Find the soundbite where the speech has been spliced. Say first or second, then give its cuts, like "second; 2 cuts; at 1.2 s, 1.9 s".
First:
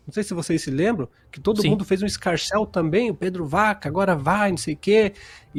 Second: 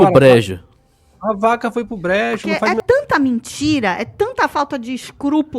second; 1 cut; at 2.7 s